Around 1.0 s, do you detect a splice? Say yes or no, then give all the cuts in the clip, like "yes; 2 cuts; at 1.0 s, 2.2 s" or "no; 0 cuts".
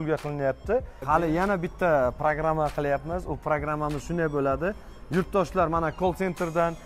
yes; 1 cut; at 1.0 s